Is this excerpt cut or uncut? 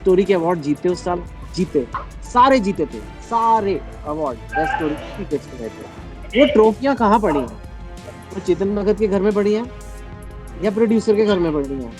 uncut